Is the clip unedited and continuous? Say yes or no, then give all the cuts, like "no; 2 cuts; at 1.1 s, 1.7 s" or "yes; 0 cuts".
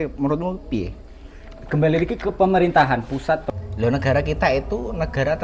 no; 1 cut; at 3.4 s